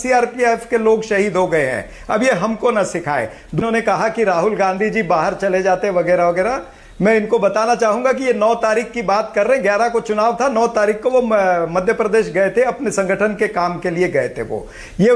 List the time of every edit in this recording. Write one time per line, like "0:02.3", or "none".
0:03.6